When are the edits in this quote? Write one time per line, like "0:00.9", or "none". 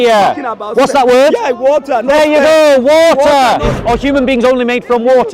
0:03.7